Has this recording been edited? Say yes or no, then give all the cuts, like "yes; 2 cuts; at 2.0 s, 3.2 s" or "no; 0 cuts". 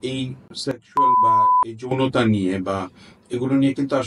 yes; 2 cuts; at 0.8 s, 1.9 s